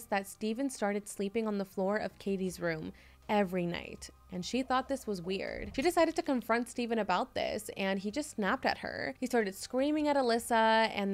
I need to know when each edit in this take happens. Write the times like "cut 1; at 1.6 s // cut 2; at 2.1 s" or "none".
cut 1; at 5.6 s // cut 2; at 9.1 s